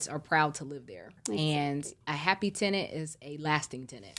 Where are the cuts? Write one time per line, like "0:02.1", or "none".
0:01.0